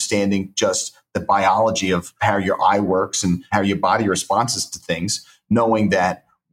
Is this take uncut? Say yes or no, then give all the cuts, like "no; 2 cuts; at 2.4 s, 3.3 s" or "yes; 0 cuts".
no; 2 cuts; at 2.1 s, 3.4 s